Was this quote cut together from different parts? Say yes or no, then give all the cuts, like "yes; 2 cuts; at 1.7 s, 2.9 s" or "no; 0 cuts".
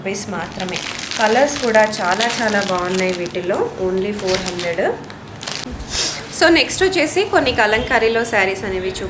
yes; 1 cut; at 5.6 s